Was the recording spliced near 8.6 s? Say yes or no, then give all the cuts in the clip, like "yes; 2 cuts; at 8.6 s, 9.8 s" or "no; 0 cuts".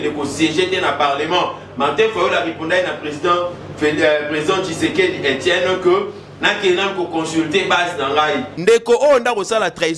yes; 1 cut; at 8.6 s